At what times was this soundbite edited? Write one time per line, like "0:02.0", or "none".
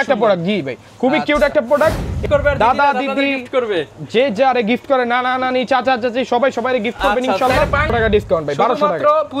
0:02.2
0:07.9

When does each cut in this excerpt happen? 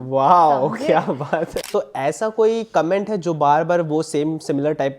0:01.6

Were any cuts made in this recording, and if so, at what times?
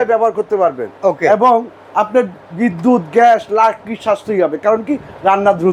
none

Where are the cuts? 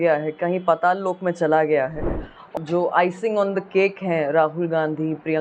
0:02.5

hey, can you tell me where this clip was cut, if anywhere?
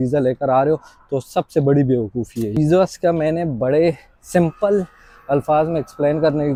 none

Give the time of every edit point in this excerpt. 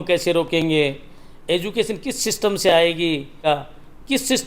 0:03.4

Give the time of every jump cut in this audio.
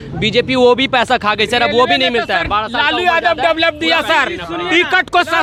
none

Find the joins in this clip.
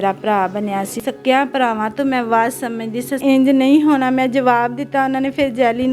0:00.9
0:03.2

